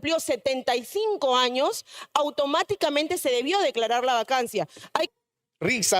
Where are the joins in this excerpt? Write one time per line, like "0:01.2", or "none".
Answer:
0:05.1